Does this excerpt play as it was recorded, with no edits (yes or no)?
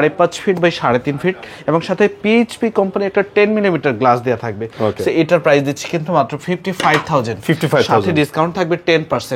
yes